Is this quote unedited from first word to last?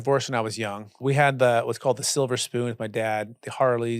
no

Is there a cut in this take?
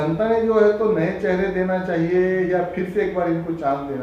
no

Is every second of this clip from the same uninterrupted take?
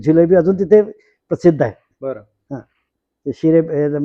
yes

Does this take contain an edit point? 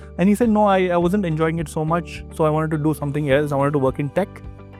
no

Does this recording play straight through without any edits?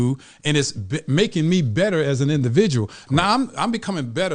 yes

